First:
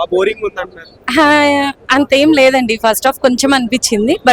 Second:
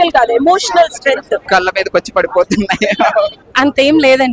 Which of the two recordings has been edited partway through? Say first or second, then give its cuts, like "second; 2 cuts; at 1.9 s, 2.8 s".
second; 2 cuts; at 1.4 s, 3.4 s